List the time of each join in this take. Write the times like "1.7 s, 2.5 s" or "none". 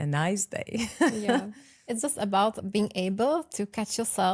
none